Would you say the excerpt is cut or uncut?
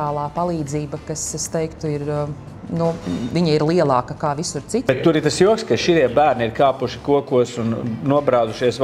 cut